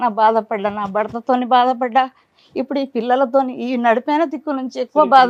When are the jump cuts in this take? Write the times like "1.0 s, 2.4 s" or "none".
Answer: none